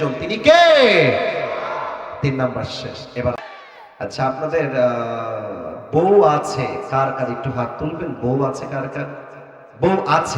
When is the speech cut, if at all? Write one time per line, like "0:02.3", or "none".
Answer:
0:03.4